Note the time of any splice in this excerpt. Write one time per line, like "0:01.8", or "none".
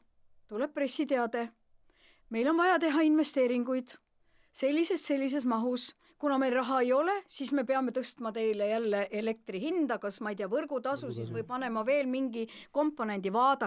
none